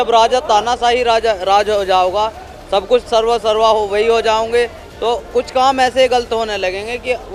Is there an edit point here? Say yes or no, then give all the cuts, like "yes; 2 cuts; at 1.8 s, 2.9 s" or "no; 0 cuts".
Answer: no; 0 cuts